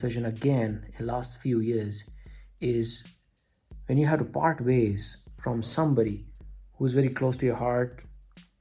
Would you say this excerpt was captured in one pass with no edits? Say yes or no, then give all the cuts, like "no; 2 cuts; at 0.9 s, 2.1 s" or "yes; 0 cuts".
yes; 0 cuts